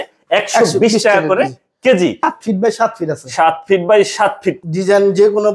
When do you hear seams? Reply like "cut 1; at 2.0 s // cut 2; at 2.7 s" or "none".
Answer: cut 1; at 2.3 s // cut 2; at 4.5 s